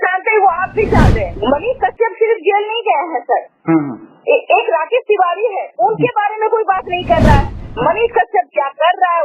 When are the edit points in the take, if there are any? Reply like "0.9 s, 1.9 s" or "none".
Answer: 1.3 s, 7.6 s

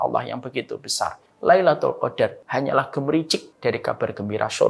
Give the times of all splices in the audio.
1.3 s, 2.4 s, 3.5 s

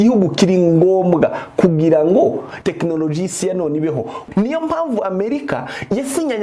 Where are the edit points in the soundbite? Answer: 2.5 s, 4.2 s

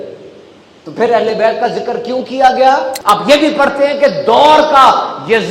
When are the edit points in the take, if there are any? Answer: 2.9 s

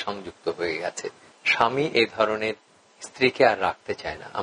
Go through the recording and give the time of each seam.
1.3 s

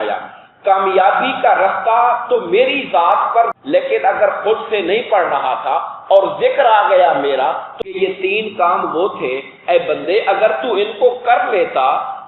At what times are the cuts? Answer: 3.6 s, 7.7 s

